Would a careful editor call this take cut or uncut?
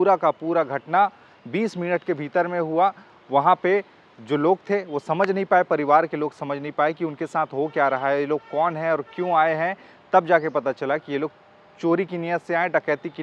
uncut